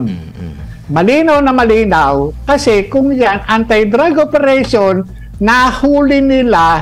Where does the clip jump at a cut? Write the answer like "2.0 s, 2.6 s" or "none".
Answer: none